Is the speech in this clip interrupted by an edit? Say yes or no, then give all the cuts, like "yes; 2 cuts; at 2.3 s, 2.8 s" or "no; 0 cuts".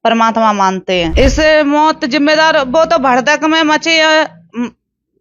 yes; 1 cut; at 1.1 s